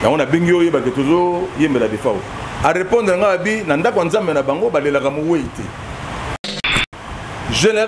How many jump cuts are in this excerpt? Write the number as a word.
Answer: one